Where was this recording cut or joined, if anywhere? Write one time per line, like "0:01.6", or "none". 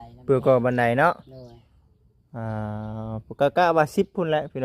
none

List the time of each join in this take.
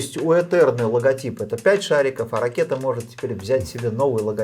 none

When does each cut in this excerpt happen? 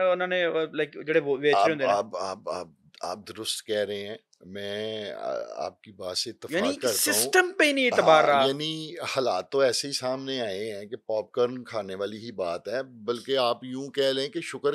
none

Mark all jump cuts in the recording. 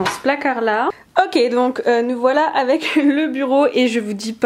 0:01.0

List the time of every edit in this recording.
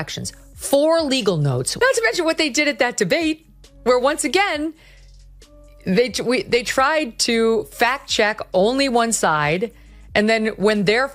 0:01.7

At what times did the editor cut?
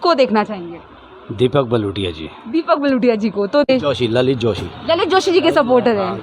0:03.7

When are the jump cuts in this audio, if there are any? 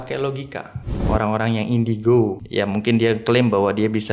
0:01.0
0:02.4

